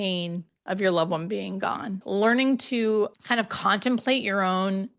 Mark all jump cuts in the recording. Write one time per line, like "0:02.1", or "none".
0:02.0
0:03.1